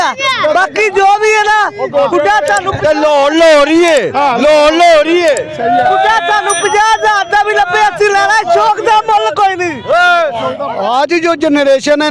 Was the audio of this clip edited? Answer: yes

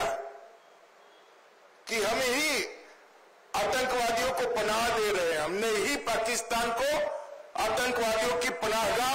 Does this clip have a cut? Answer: no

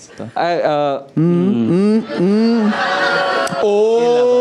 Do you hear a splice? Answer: no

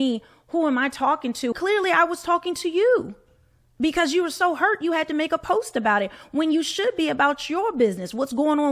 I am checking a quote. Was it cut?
yes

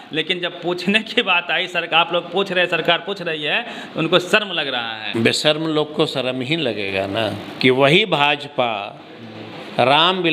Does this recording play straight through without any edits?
no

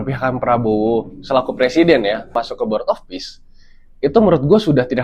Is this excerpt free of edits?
no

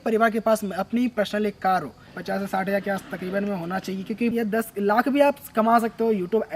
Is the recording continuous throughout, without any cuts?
no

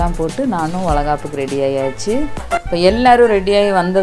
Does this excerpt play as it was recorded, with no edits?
no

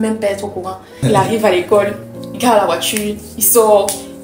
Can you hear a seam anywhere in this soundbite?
yes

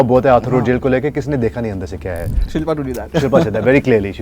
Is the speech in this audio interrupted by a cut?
yes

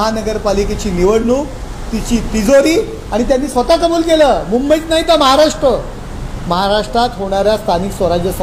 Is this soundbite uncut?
yes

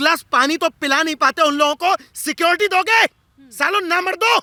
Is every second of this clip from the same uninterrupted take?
yes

